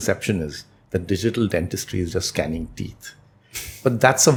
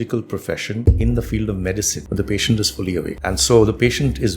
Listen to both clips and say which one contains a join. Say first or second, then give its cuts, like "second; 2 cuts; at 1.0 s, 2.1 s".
second; 3 cuts; at 0.8 s, 2.0 s, 3.1 s